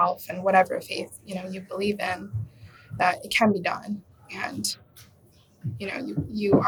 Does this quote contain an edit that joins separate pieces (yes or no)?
no